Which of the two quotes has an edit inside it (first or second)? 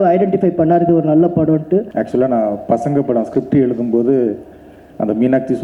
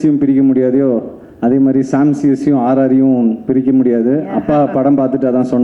first